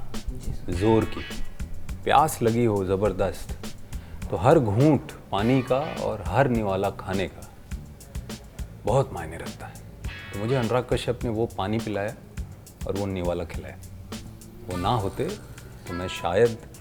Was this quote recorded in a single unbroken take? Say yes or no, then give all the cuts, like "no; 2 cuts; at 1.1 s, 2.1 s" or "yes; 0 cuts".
yes; 0 cuts